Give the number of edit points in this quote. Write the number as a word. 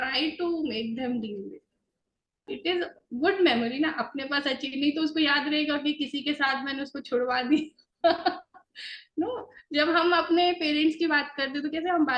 one